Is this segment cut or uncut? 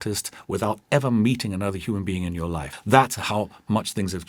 cut